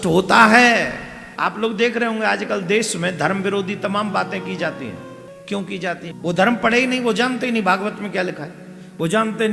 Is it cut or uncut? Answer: cut